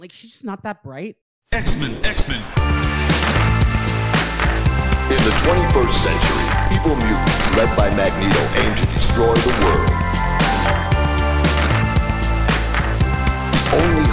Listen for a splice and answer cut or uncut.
cut